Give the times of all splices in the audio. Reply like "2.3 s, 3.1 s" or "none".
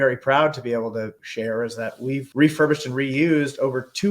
1.2 s, 2.3 s